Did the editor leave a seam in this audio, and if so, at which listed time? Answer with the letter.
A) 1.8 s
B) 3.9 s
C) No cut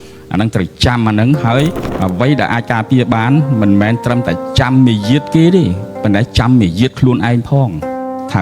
A